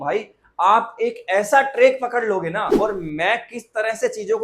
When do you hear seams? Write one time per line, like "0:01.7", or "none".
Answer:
0:02.7